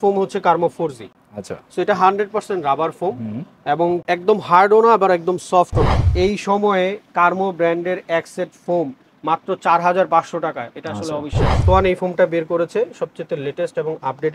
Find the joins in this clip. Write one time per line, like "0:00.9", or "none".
0:06.1
0:11.6